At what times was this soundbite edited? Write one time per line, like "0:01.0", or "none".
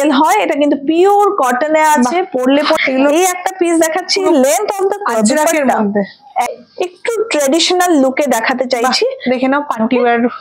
0:02.8
0:06.5